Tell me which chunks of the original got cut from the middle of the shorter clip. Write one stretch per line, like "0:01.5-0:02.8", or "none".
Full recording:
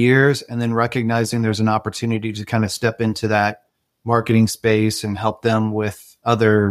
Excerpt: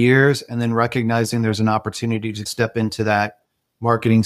0:02.5-0:02.7

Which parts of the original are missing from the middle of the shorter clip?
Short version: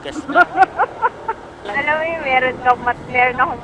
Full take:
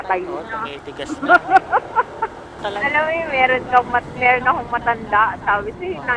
0:02.5-0:02.6

